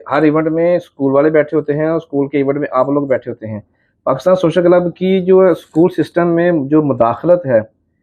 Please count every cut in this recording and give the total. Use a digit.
0